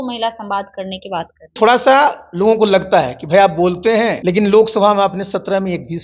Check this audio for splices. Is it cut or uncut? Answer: cut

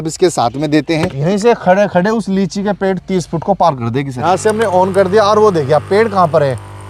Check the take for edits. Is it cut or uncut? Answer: cut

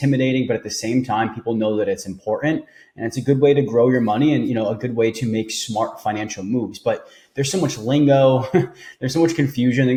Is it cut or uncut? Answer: uncut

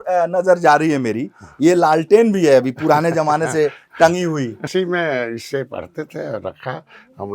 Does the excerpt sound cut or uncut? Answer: cut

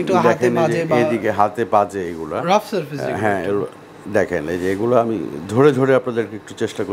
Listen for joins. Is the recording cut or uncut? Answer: uncut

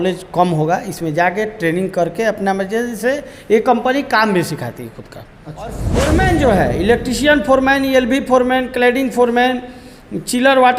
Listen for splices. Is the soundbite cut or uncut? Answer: cut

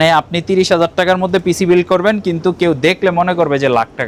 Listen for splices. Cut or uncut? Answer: uncut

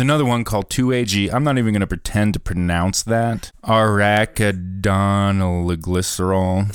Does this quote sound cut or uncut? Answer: cut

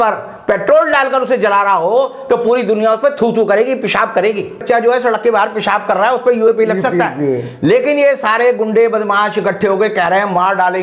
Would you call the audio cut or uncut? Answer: cut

